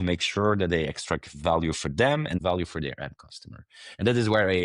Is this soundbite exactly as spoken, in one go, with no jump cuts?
no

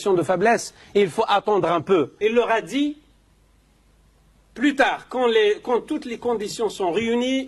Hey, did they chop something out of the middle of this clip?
yes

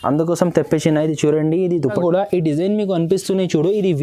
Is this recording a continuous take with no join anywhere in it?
no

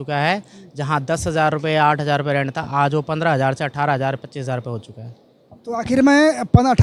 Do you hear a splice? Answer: no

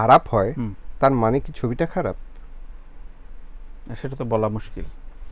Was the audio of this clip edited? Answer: no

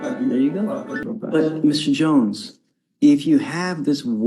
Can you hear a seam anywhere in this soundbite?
yes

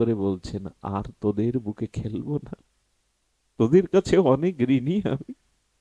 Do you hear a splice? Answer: no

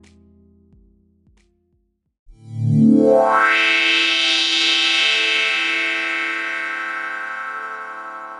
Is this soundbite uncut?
no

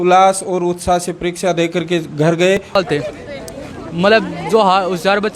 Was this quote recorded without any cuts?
no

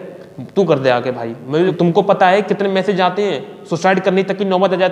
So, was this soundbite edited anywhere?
yes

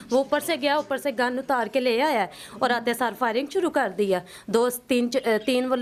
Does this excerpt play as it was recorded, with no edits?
yes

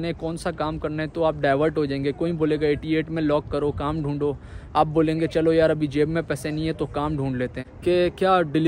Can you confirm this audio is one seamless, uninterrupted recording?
no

